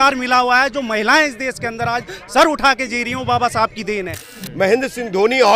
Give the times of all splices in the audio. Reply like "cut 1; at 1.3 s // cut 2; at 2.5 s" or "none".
cut 1; at 4.4 s